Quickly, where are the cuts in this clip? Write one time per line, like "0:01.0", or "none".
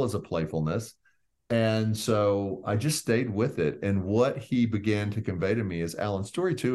none